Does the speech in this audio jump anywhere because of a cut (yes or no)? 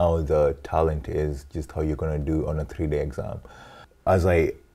yes